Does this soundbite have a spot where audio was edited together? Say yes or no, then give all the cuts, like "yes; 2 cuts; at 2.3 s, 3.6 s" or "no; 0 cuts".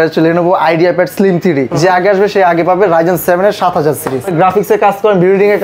yes; 2 cuts; at 1.7 s, 4.3 s